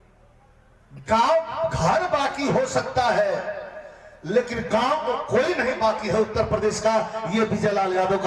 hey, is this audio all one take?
yes; 0 cuts

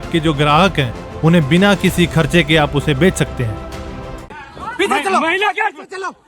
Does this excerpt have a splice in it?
yes; 1 cut; at 4.3 s

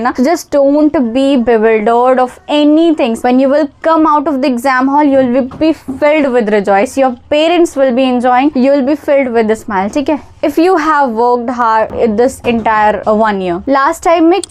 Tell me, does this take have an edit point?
no; 0 cuts

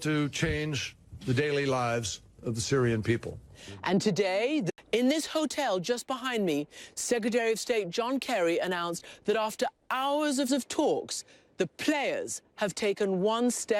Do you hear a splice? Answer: no; 0 cuts

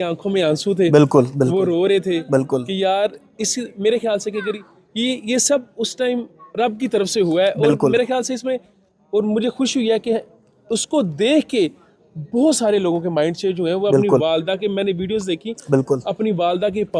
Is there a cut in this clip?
no; 0 cuts

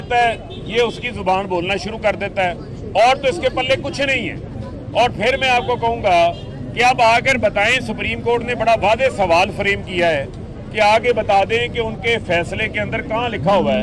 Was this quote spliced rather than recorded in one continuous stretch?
no; 0 cuts

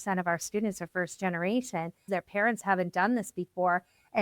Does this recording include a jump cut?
yes; 1 cut; at 2.1 s

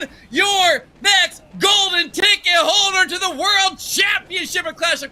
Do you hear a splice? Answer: no; 0 cuts

